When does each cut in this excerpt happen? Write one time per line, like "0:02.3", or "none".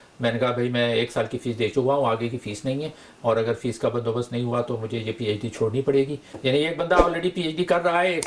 0:06.2